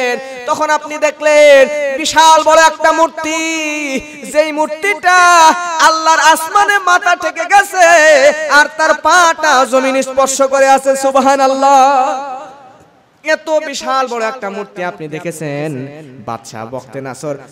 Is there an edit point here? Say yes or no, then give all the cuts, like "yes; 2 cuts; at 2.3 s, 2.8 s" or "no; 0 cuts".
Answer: no; 0 cuts